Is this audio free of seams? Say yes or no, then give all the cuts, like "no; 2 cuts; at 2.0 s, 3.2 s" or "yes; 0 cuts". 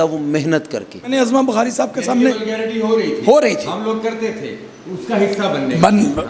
no; 1 cut; at 1.1 s